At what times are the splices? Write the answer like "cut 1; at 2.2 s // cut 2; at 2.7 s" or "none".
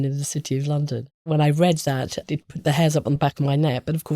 cut 1; at 1.2 s // cut 2; at 2.2 s // cut 3; at 3.2 s